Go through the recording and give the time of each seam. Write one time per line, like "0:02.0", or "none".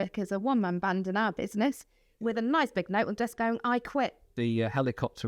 0:04.3